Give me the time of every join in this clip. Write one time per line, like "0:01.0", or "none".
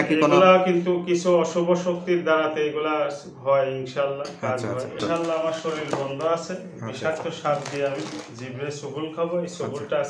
0:05.0

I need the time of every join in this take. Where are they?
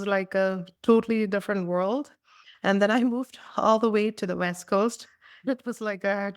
0:02.4
0:05.5

